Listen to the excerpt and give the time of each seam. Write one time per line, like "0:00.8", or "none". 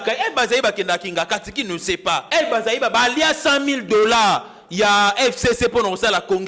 0:02.2

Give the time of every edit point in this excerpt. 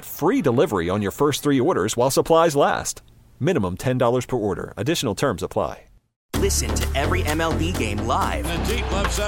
0:06.3

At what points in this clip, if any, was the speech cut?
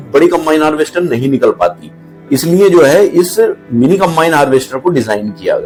none

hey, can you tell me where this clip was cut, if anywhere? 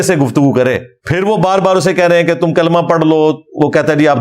0:01.0

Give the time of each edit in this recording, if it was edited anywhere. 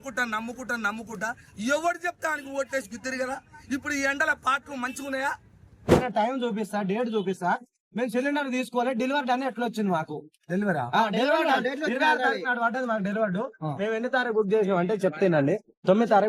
0:05.9

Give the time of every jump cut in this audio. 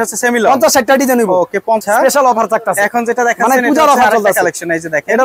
0:01.8

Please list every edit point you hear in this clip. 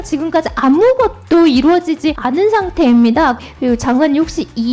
0:02.2
0:03.4

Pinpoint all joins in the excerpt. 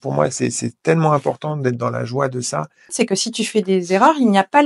0:02.9

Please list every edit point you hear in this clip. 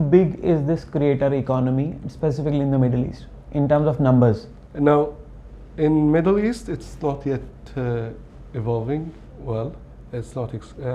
none

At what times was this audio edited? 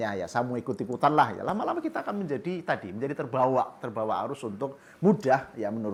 none

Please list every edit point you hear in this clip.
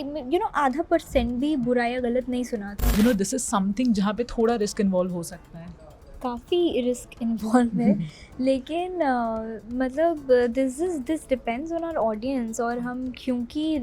0:02.9

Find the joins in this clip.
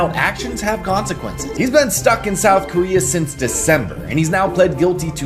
none

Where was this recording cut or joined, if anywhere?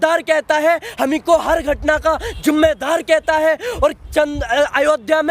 none

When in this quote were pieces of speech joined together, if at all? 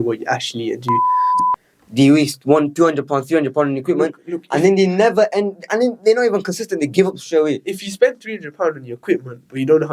0:01.3

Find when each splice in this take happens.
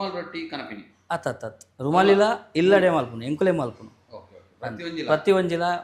none

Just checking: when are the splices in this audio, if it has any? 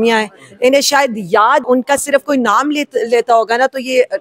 0:01.6

